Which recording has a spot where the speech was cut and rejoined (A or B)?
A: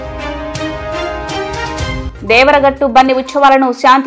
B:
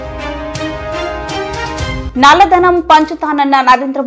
A